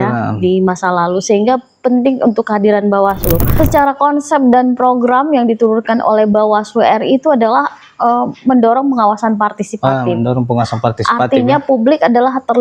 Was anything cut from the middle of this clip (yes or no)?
yes